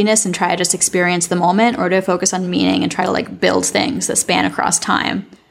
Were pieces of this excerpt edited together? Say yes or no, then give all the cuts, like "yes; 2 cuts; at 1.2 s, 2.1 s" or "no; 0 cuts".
no; 0 cuts